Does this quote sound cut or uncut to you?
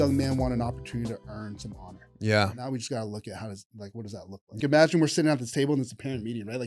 cut